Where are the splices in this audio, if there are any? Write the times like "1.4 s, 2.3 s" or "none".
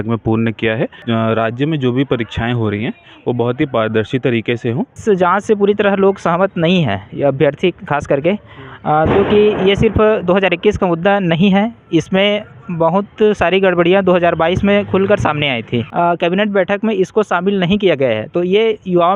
1.0 s, 5.0 s, 15.9 s